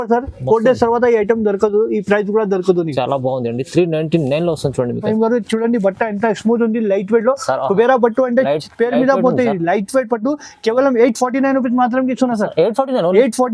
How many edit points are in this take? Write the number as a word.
one